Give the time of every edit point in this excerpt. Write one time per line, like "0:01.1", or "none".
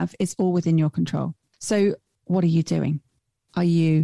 0:01.5
0:02.1